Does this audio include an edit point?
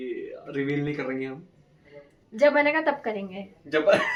no; 0 cuts

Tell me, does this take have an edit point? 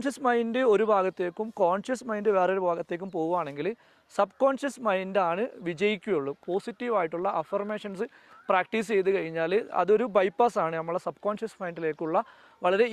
yes; 1 cut; at 6.4 s

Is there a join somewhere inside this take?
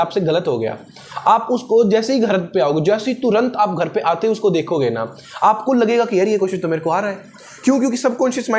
no; 0 cuts

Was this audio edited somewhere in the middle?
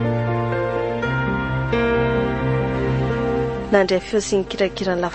yes; 1 cut; at 3.6 s

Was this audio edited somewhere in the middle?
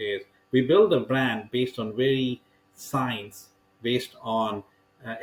no; 0 cuts

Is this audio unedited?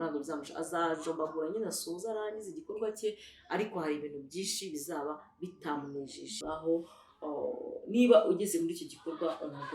no; 1 cut; at 6.4 s

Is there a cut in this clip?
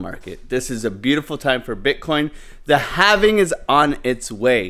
no; 0 cuts

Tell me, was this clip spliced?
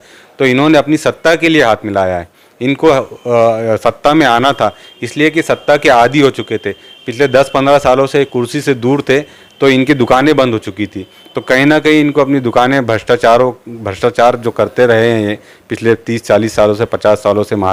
no; 0 cuts

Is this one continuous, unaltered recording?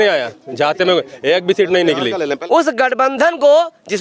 no; 1 cut; at 2.4 s

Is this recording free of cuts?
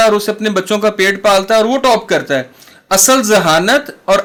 yes; 0 cuts

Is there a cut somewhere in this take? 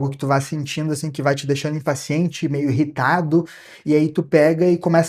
no; 0 cuts

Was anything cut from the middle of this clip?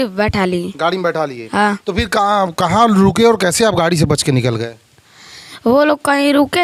no; 0 cuts

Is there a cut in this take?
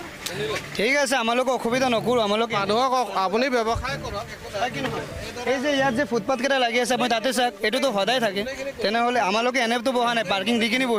no; 0 cuts

